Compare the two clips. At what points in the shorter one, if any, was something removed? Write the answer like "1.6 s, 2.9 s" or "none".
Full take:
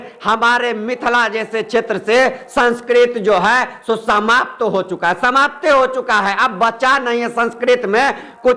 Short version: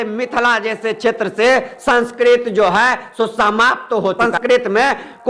4.2 s